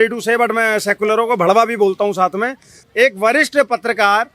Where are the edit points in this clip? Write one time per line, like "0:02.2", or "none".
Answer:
0:02.8